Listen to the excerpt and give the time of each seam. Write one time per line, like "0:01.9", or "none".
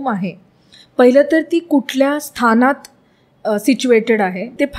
none